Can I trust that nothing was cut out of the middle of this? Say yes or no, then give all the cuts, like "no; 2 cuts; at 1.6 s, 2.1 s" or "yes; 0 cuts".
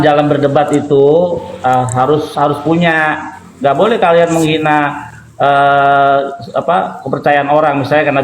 yes; 0 cuts